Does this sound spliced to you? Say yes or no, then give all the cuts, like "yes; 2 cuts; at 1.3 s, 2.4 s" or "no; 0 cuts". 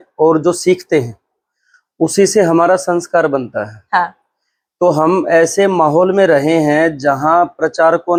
no; 0 cuts